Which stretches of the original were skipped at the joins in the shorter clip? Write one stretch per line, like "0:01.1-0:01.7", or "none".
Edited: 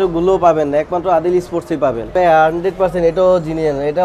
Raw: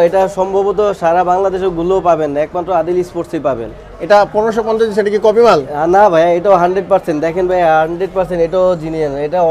0:03.8-0:07.5

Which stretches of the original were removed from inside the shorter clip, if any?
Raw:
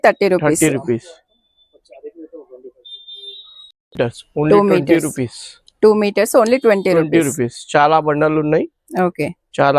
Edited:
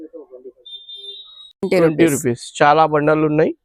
0:03.8-0:06.8

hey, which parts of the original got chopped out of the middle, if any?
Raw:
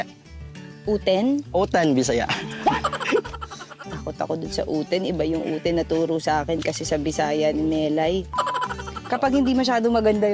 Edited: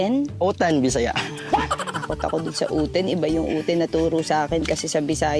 0:03.0-0:03.8

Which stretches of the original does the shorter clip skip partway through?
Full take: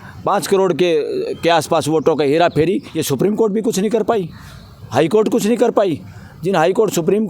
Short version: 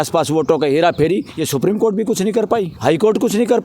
0:04.3-0:04.8

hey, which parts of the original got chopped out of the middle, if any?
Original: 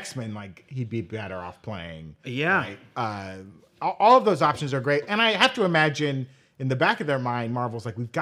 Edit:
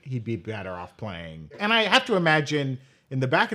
0:02.2-0:05.1

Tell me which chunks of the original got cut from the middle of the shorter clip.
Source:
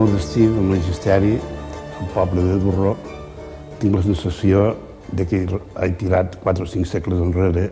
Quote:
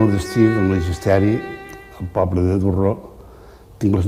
none

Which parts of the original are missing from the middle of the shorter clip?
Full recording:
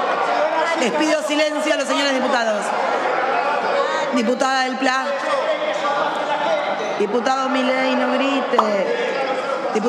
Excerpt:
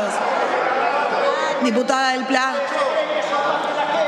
none

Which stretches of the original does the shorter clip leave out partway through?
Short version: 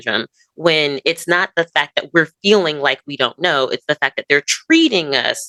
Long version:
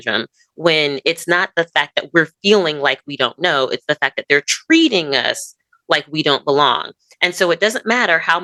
none

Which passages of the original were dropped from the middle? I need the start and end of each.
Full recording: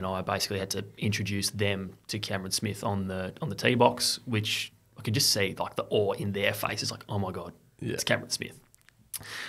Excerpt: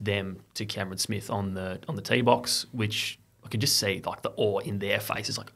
none

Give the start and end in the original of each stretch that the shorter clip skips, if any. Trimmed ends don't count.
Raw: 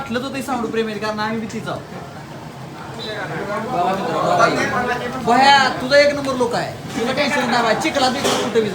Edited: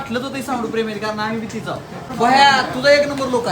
0:02.0-0:05.1

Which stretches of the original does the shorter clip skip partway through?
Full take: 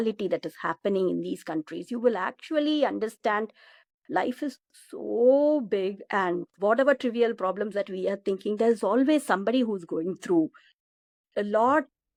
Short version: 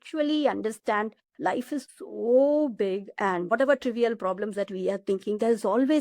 0:04.0-0:04.6
0:06.4-0:06.7

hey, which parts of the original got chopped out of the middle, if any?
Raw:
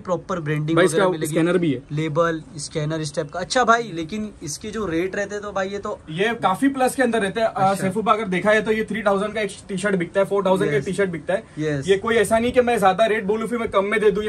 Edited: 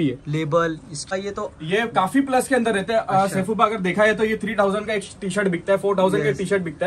0:02.7-0:05.5

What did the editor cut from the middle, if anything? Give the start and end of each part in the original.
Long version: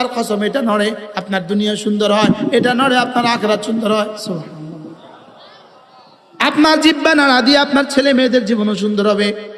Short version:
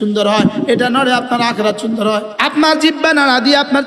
0:04.2-0:06.3

